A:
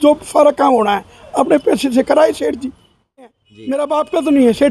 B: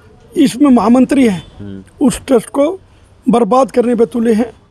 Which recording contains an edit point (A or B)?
A